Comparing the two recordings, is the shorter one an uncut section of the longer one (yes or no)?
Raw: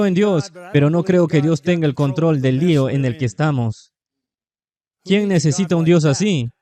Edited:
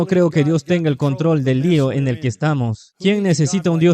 no